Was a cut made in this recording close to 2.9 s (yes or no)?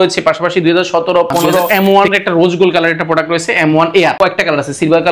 no